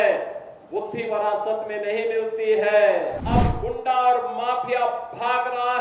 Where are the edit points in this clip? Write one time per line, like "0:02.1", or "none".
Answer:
0:03.2